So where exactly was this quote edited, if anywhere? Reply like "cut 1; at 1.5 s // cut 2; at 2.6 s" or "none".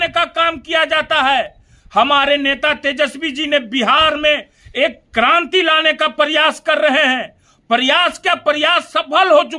none